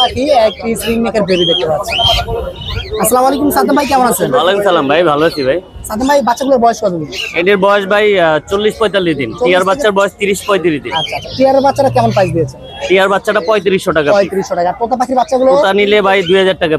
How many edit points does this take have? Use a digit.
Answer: 0